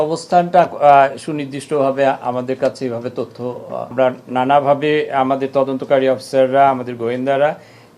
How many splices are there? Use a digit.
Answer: 1